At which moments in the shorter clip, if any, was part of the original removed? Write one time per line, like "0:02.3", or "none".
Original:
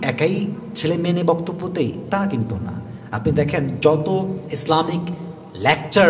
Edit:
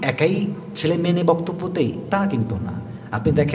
none